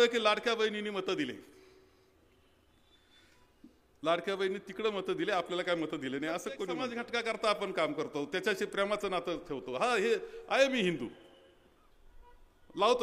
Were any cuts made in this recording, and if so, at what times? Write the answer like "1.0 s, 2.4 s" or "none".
7.0 s